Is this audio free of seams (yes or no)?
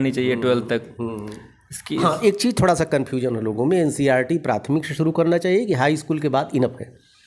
yes